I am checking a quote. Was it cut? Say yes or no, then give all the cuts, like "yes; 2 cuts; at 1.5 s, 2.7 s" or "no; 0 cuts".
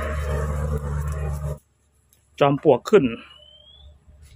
yes; 1 cut; at 1.5 s